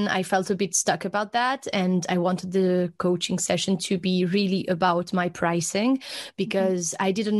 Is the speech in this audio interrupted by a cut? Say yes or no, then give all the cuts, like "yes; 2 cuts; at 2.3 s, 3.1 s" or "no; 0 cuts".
no; 0 cuts